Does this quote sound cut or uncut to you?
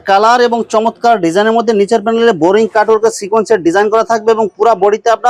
uncut